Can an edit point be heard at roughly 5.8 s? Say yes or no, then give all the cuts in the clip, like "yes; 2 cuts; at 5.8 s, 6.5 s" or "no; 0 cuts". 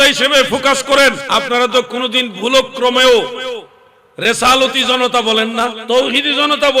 yes; 2 cuts; at 1.2 s, 5.8 s